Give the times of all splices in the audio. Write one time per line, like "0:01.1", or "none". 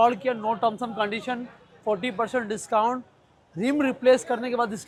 none